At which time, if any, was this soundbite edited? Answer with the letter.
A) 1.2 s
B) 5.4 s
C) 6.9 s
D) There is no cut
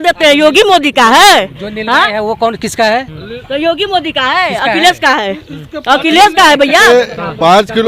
C